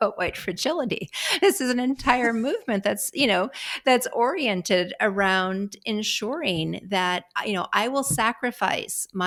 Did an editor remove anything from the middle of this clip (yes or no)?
no